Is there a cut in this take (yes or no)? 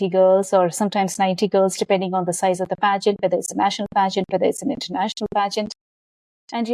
no